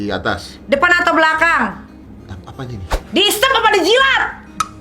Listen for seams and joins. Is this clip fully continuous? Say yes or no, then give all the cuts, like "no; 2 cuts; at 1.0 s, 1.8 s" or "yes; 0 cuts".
no; 1 cut; at 3.0 s